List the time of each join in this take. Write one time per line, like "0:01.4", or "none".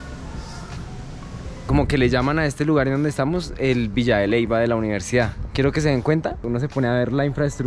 0:01.6